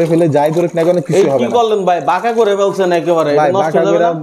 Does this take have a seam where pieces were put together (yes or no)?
no